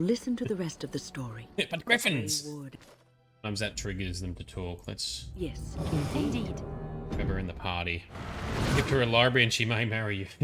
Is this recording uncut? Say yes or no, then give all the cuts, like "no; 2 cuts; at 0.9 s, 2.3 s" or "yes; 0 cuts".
no; 1 cut; at 2.8 s